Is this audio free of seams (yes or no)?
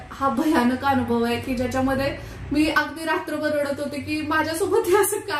yes